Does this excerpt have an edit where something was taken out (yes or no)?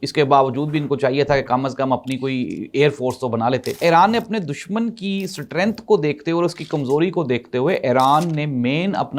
yes